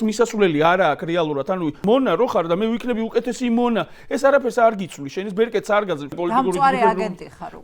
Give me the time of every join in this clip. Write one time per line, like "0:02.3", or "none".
0:01.8
0:06.1